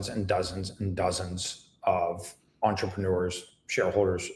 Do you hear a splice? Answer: no; 0 cuts

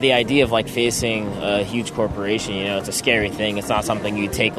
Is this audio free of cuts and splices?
yes; 0 cuts

